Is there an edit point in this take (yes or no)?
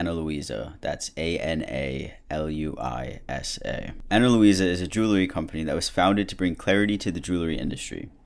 no